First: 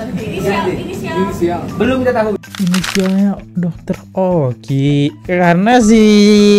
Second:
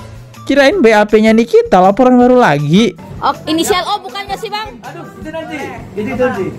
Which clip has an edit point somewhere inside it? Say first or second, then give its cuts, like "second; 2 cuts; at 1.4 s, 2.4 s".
second; 1 cut; at 3.0 s